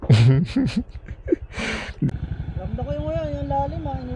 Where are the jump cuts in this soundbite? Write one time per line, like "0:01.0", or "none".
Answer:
none